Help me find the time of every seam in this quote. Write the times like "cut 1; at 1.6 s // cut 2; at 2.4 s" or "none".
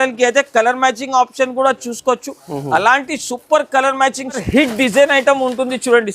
cut 1; at 4.4 s